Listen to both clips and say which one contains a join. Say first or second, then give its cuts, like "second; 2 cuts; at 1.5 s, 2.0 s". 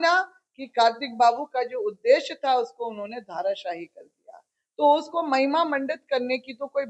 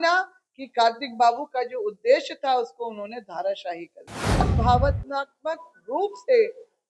second; 1 cut; at 4.5 s